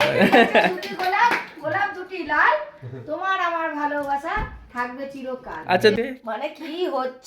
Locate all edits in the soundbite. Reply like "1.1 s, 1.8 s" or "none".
5.9 s